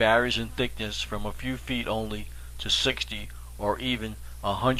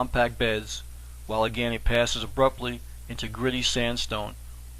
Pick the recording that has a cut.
second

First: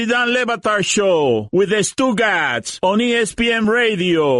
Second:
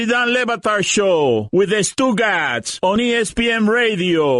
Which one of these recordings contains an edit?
first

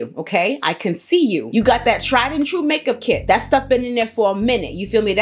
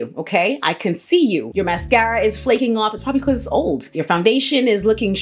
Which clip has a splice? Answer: second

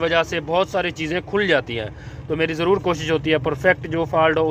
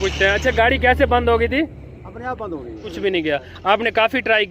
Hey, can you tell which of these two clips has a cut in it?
second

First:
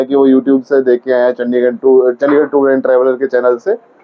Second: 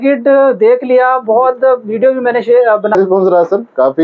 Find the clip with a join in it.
second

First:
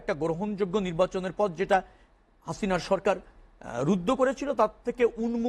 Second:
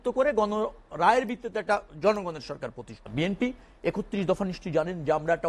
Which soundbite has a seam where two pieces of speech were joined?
second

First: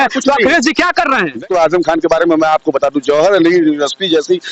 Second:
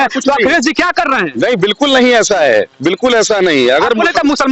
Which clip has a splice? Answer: first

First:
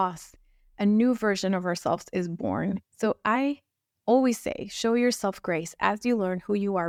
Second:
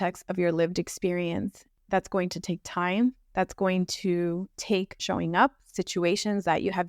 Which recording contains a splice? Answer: second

